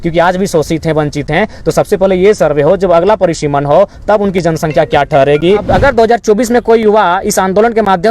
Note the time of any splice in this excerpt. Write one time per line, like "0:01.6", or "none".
0:05.6